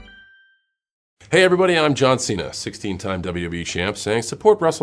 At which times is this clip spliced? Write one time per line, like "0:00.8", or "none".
0:01.1